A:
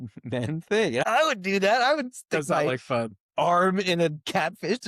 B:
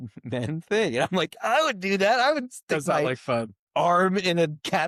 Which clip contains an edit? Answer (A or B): A